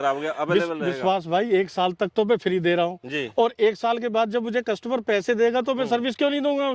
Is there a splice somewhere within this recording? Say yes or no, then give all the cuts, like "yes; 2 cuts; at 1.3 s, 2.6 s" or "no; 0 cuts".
no; 0 cuts